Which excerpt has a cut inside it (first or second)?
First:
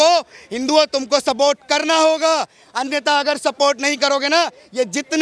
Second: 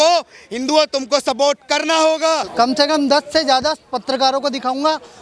second